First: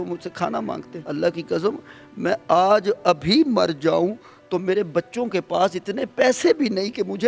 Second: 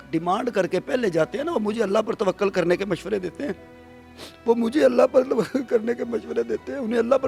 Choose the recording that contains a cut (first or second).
first